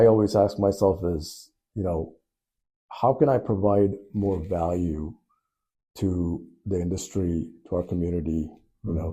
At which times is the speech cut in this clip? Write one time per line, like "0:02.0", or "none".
none